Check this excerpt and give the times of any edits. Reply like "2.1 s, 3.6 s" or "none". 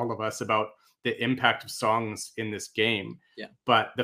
none